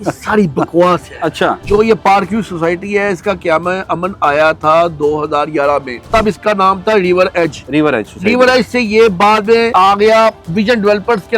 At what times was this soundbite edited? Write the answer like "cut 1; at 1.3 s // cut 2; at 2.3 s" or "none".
cut 1; at 1.6 s // cut 2; at 6.1 s // cut 3; at 7.6 s // cut 4; at 9.7 s